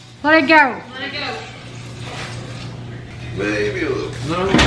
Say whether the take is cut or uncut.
uncut